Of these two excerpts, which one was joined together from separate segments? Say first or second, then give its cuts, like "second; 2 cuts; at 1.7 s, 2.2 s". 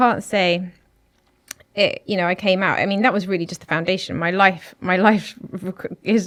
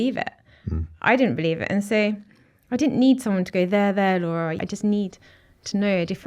second; 1 cut; at 4.6 s